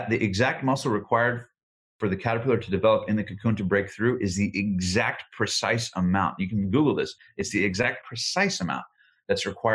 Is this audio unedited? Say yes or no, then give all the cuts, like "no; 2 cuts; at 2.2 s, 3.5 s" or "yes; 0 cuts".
no; 2 cuts; at 7.2 s, 8.1 s